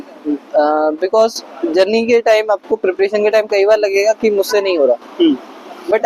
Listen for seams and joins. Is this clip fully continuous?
yes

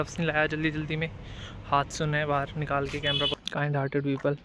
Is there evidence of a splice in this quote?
yes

